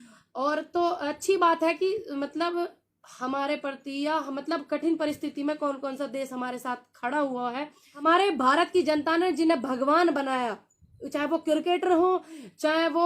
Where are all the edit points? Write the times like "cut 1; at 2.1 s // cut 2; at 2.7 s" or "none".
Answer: cut 1; at 8.0 s